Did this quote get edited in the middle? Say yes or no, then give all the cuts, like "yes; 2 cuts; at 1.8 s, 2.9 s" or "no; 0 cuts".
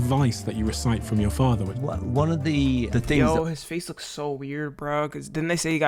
no; 0 cuts